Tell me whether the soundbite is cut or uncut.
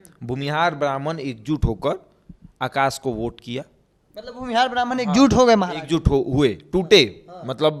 uncut